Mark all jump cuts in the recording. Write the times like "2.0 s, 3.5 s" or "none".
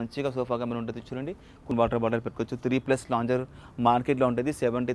1.7 s